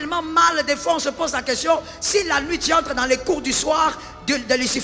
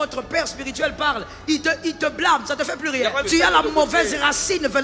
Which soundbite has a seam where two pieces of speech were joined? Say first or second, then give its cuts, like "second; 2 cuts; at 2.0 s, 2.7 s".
second; 1 cut; at 3.2 s